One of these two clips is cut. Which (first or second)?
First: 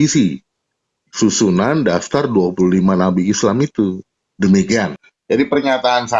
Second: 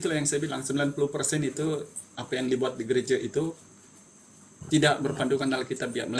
first